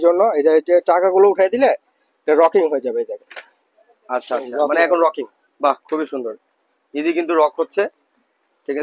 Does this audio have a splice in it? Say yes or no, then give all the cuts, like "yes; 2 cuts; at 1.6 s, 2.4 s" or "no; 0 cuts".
no; 0 cuts